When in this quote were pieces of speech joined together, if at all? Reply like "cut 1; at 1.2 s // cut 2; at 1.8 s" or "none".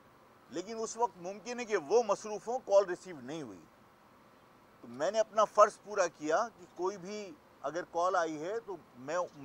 none